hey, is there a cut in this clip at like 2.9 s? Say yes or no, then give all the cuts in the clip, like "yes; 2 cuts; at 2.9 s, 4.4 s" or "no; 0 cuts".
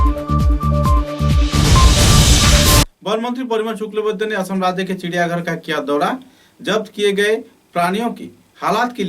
yes; 1 cut; at 2.9 s